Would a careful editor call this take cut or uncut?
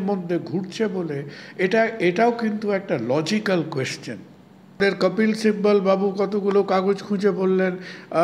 cut